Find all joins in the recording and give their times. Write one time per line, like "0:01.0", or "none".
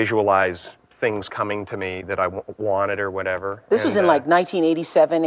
none